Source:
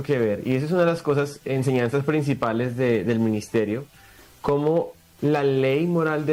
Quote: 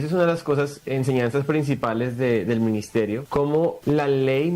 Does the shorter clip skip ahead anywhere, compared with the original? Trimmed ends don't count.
yes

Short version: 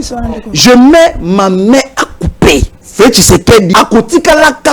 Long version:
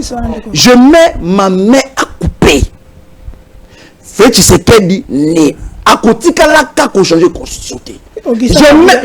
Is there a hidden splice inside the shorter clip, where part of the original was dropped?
yes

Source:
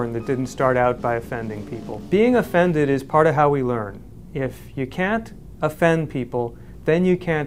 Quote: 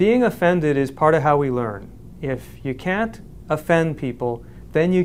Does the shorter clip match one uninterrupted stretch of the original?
yes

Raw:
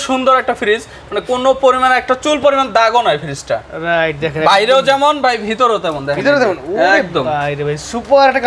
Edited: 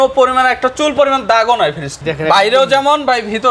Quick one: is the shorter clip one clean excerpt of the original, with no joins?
no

